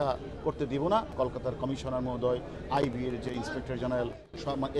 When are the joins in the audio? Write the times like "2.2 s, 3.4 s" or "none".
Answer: 1.1 s